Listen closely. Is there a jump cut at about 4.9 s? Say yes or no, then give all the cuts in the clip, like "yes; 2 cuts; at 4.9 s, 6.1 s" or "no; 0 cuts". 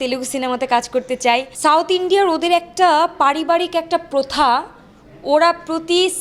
no; 1 cut; at 1.5 s